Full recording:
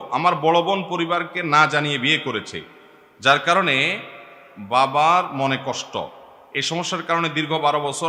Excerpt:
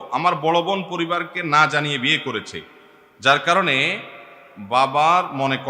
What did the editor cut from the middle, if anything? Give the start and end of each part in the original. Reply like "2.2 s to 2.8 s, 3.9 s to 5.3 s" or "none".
none